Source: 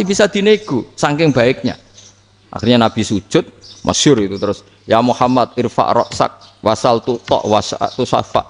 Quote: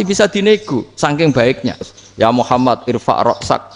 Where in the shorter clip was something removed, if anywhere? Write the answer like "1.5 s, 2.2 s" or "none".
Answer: 2.0 s